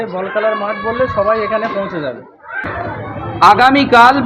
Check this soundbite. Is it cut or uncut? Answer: cut